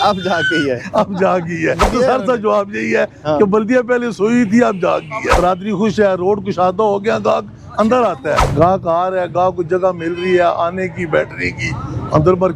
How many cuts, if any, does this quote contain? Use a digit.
3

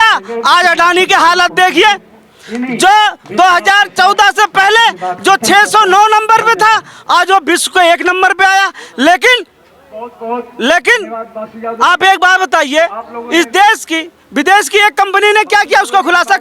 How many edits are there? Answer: 0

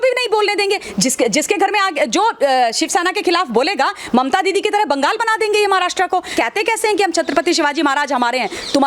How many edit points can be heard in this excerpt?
1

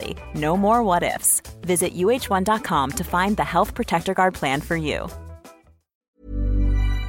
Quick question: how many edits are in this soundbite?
1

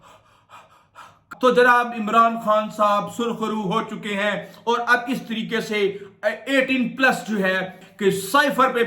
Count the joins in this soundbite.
2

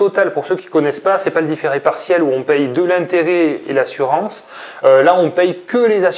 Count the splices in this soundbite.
0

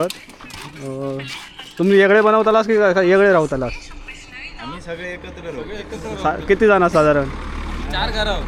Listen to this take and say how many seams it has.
0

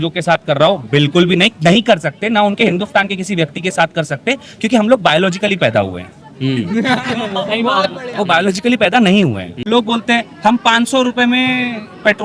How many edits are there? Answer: 1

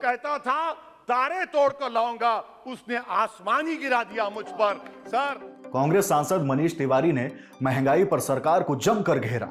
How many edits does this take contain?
0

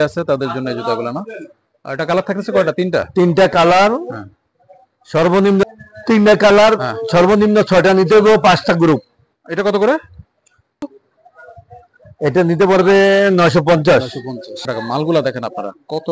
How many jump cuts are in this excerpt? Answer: 3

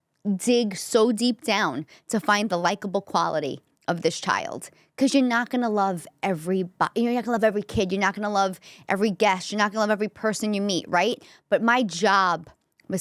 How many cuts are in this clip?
0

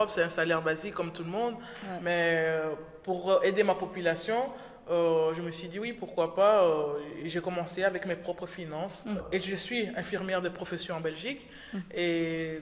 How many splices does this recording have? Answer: 1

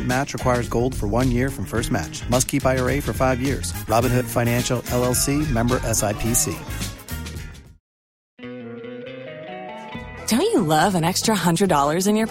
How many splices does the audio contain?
1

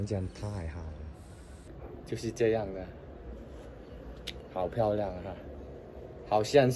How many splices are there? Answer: 2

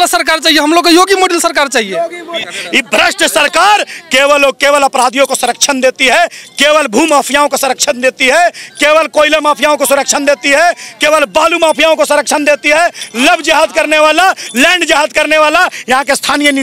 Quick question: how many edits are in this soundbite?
1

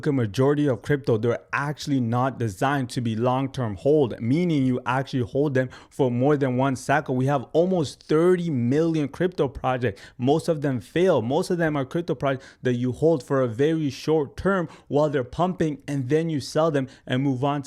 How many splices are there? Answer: 0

